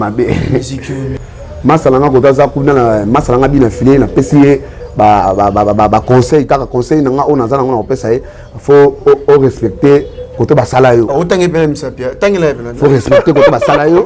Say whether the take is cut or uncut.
cut